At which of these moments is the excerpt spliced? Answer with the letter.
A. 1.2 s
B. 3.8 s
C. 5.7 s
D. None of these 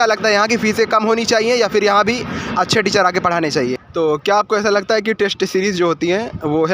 B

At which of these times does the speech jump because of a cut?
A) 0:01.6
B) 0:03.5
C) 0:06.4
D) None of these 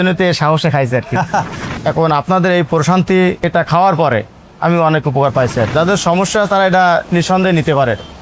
A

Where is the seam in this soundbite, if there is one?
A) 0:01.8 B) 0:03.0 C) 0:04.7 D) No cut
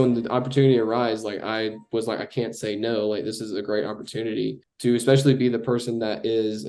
C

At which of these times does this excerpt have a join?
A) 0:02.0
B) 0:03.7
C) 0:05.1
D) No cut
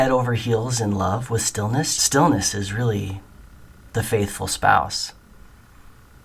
A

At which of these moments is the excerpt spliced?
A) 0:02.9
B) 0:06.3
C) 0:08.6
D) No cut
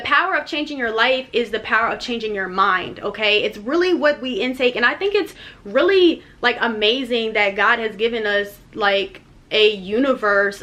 D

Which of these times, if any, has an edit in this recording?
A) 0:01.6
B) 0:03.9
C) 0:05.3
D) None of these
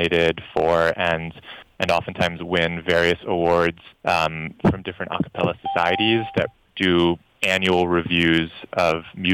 B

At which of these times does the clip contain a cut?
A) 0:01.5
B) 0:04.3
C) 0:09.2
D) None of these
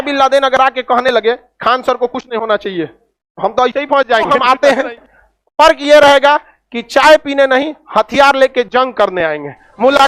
B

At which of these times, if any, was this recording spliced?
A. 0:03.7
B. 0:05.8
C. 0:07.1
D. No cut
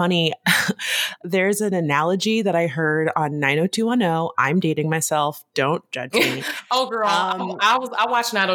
D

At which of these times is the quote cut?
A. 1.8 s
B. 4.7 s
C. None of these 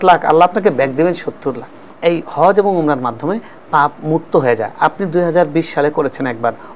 A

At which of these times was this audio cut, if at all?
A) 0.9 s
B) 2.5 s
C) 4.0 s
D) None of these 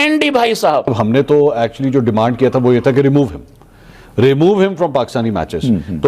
A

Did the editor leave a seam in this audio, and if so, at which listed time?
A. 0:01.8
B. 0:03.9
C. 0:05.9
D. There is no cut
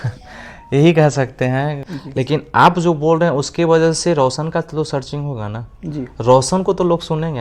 A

